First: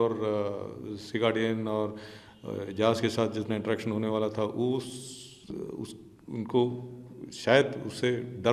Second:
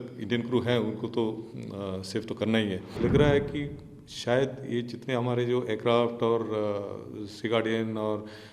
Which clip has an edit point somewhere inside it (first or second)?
second